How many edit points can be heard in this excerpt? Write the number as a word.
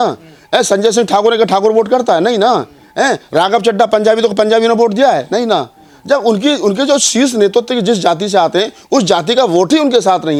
zero